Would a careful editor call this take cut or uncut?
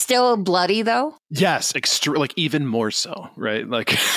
cut